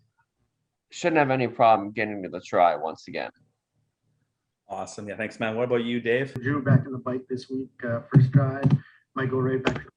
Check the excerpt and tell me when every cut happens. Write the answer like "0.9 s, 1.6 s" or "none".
6.4 s